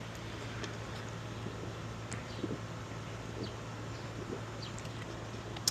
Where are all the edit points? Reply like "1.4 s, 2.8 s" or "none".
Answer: none